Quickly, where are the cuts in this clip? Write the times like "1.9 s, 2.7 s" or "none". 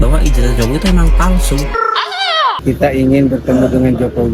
2.6 s